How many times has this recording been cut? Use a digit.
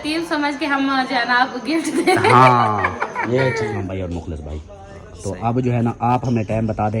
1